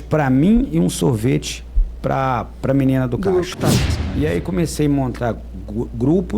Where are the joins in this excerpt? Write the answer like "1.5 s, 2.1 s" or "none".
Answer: 4.0 s